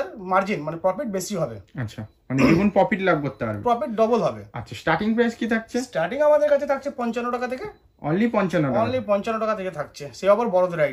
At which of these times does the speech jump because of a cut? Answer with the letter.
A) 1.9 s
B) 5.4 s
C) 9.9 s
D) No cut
D